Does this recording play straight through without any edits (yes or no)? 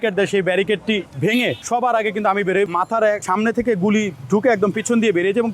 no